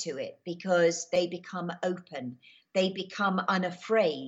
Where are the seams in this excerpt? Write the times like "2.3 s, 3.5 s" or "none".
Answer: 1.2 s

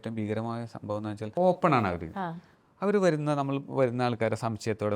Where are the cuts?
1.3 s

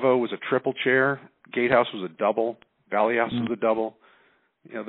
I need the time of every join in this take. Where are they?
none

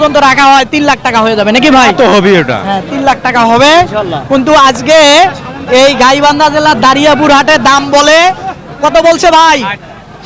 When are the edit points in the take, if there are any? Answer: none

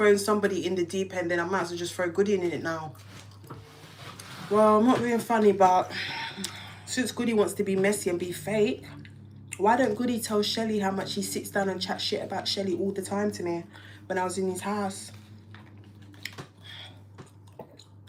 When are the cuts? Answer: none

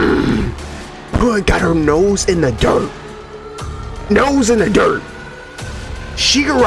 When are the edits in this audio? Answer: none

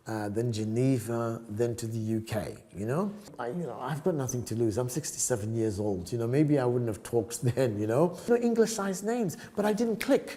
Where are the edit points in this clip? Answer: 3.3 s, 8.3 s

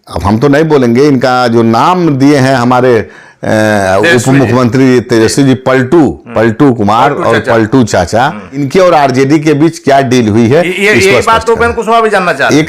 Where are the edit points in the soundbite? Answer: 8.7 s

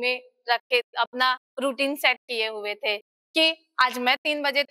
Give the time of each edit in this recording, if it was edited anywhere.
none

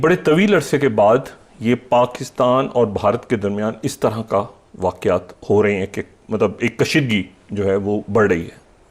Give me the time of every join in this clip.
none

